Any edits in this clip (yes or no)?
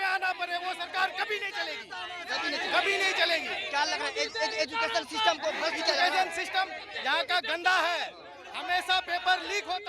no